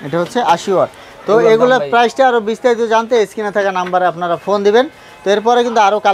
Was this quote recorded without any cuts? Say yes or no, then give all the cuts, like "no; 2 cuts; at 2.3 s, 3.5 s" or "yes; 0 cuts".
yes; 0 cuts